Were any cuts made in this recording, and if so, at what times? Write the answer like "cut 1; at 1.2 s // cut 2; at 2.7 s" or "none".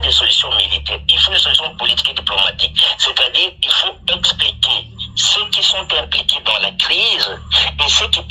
none